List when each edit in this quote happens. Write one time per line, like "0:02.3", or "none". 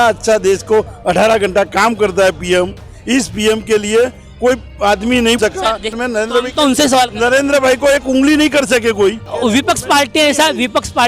0:06.0
0:09.3